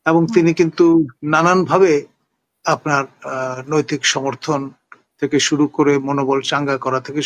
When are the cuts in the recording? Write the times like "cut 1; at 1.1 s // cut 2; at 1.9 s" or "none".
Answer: none